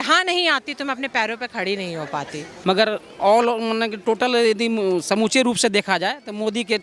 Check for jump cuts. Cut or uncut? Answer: cut